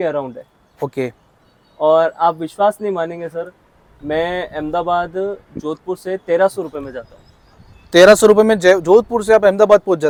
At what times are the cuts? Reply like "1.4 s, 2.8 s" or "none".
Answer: none